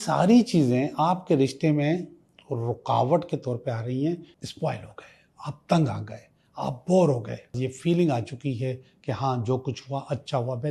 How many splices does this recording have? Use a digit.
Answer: 2